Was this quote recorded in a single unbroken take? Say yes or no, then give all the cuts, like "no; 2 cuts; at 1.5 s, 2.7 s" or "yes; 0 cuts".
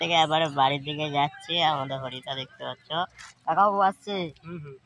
yes; 0 cuts